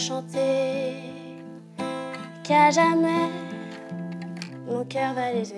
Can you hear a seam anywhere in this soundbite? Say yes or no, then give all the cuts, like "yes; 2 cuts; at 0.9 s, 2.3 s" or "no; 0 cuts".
yes; 1 cut; at 4.4 s